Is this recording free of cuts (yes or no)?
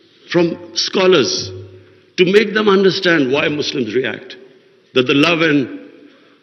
yes